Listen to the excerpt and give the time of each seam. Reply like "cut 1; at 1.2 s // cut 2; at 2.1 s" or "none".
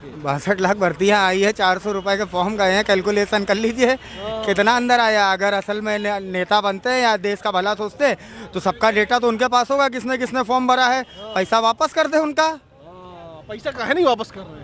none